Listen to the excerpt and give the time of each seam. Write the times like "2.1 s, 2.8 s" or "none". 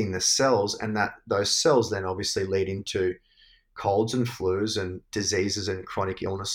5.0 s